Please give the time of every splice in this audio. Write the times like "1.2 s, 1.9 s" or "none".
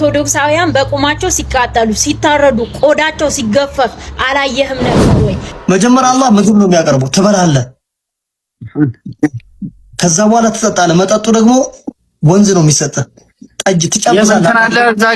4.9 s

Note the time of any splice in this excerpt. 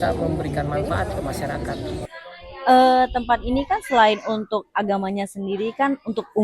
2.1 s

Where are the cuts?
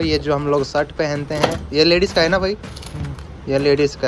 none

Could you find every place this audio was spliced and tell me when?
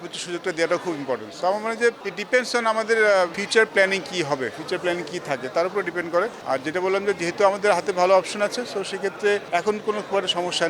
none

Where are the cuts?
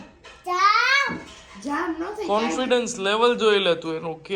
none

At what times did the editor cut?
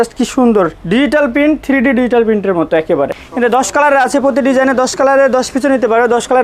3.2 s

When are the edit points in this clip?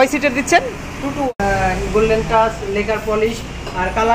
1.3 s

